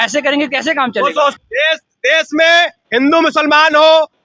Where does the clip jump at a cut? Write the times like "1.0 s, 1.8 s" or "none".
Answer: 1.4 s